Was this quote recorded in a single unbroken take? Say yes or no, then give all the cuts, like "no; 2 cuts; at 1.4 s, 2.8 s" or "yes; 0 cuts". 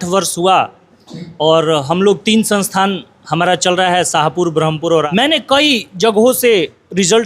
no; 1 cut; at 5.1 s